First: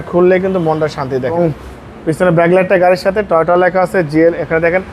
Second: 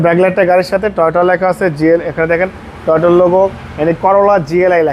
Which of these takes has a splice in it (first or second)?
first